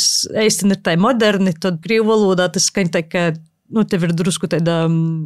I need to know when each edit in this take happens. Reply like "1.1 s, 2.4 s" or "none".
1.8 s

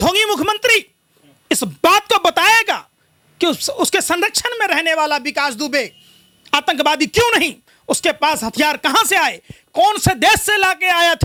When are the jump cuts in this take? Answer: none

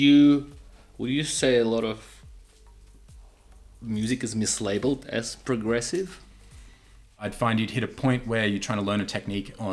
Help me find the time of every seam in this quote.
7.0 s

